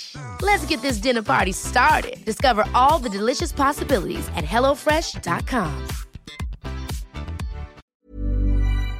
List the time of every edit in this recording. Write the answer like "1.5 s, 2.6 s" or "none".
7.8 s